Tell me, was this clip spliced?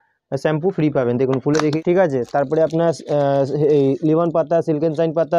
yes; 1 cut; at 1.8 s

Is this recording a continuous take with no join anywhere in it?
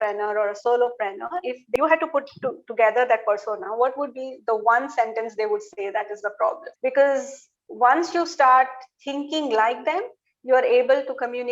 no; 2 cuts; at 1.8 s, 6.7 s

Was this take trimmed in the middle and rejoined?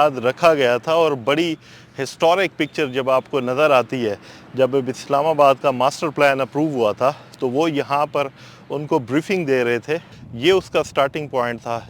yes; 1 cut; at 10.1 s

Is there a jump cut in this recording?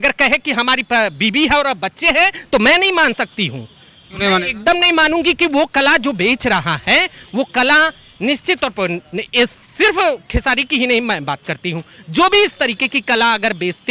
no; 0 cuts

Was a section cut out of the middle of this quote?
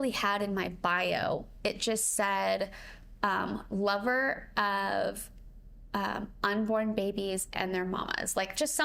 no; 0 cuts

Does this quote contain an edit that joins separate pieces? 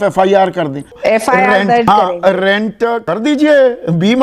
yes; 3 cuts; at 0.9 s, 1.9 s, 3.0 s

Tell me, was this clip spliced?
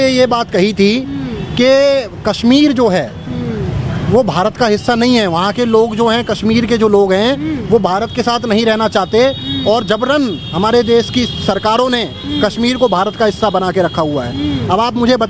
no; 0 cuts

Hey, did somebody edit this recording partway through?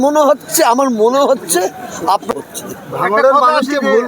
yes; 1 cut; at 2.3 s

